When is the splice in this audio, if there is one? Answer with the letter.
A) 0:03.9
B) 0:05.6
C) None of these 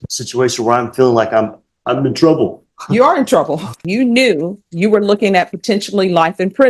A